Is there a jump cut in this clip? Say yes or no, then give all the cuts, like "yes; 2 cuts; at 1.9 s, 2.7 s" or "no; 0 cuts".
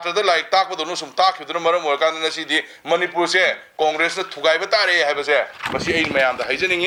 no; 0 cuts